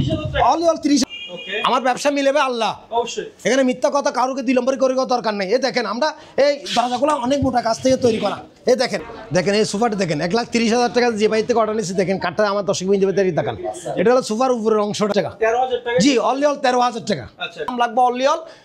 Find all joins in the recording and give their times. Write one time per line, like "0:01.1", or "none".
0:01.0
0:09.1
0:15.1
0:17.7